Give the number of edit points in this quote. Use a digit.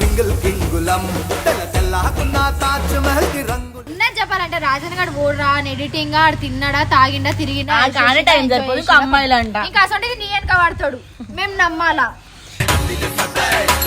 1